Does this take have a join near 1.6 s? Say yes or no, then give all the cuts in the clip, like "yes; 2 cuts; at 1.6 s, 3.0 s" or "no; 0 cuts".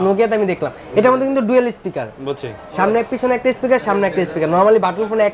no; 0 cuts